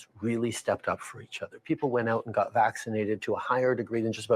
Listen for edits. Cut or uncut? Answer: cut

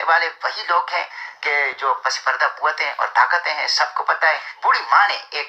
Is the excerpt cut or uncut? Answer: cut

